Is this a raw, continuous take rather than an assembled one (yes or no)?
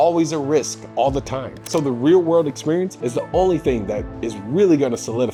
yes